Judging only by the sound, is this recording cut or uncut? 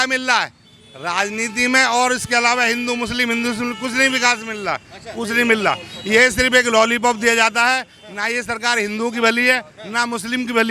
uncut